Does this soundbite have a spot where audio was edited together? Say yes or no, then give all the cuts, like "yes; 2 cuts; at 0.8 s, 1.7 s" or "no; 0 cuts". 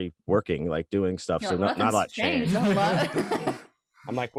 no; 0 cuts